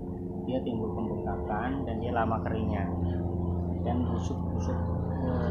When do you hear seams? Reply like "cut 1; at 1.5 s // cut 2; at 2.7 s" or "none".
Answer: none